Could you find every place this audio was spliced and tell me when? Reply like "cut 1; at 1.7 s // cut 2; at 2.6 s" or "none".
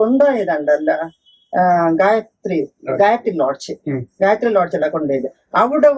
none